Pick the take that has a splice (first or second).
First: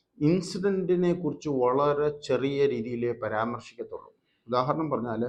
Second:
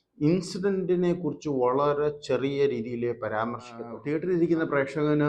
second